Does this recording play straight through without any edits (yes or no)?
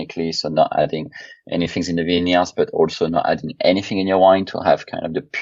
yes